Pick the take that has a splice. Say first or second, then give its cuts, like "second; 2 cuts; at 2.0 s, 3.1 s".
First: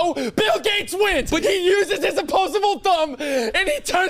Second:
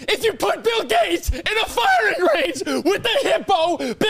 first; 1 cut; at 1.4 s